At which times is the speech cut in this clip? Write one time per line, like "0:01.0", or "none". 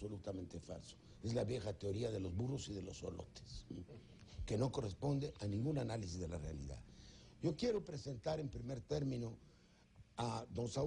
0:08.7